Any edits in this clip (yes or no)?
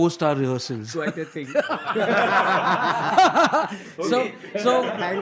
no